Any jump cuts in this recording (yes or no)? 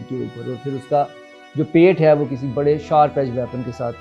no